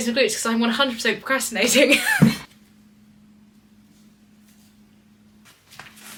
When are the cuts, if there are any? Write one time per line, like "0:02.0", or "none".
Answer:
none